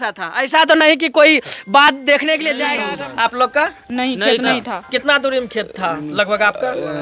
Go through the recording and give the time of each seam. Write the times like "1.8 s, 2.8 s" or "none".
2.7 s